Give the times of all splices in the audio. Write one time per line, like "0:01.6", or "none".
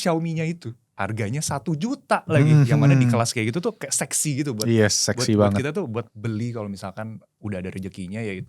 0:01.0
0:06.1